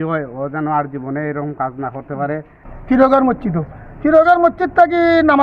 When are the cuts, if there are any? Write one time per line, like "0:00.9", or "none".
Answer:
0:02.7